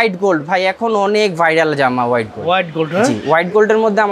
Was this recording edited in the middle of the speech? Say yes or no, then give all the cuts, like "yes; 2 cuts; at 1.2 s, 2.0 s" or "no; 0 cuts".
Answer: no; 0 cuts